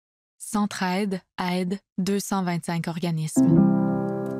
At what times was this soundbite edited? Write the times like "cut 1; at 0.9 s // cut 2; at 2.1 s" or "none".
cut 1; at 3.2 s